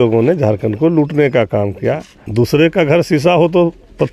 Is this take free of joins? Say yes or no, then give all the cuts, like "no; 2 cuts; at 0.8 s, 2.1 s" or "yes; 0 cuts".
no; 1 cut; at 2.1 s